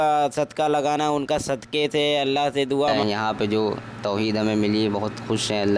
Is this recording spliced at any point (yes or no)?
yes